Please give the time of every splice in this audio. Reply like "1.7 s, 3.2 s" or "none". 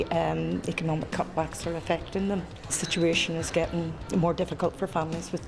2.7 s, 4.0 s